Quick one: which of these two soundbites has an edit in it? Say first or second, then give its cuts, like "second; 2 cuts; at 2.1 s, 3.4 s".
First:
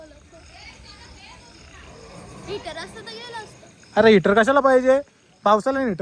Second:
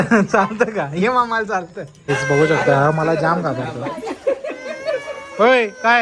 second; 1 cut; at 2.0 s